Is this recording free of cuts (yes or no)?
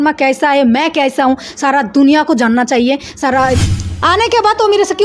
no